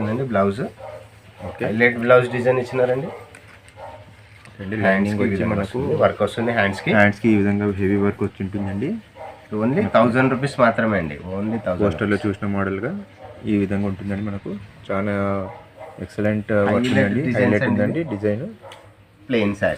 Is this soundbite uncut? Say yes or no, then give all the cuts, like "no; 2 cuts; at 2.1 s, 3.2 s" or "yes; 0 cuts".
yes; 0 cuts